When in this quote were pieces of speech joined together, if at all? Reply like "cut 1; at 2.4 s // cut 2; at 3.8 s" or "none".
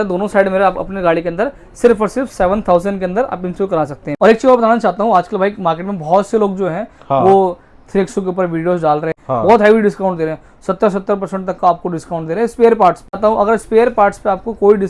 cut 1; at 4.0 s // cut 2; at 9.2 s // cut 3; at 13.2 s